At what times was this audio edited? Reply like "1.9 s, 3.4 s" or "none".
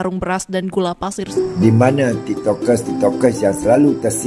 1.3 s